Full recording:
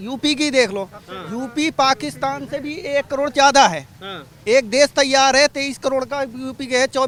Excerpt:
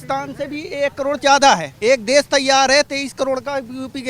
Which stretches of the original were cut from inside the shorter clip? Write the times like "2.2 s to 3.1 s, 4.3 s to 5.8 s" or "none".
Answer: 3.8 s to 4.3 s